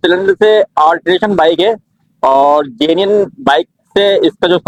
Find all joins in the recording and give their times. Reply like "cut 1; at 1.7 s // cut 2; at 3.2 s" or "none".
none

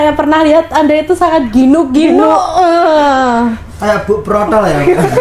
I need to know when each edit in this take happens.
none

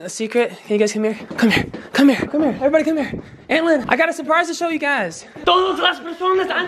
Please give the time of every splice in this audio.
cut 1; at 1.3 s // cut 2; at 2.3 s // cut 3; at 3.8 s

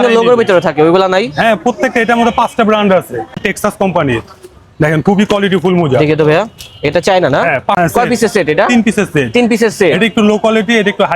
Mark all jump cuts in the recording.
cut 1; at 3.3 s // cut 2; at 7.8 s

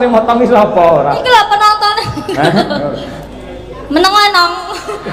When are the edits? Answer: cut 1; at 3.2 s

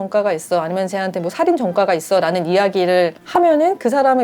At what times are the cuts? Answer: none

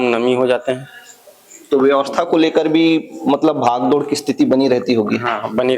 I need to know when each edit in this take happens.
none

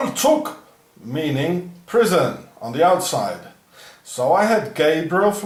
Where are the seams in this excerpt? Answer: none

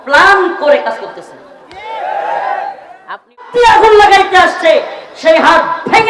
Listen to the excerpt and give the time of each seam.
cut 1; at 3.5 s

